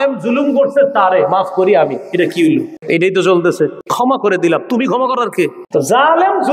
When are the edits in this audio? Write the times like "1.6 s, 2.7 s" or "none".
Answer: 2.8 s, 3.8 s, 5.6 s